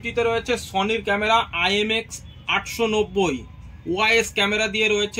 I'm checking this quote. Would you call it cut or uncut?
uncut